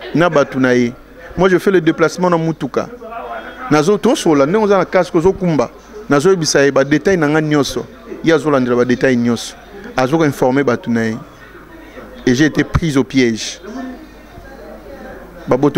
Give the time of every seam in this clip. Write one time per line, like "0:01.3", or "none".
none